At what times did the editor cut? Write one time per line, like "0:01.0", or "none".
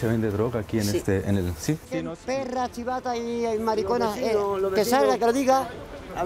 0:01.9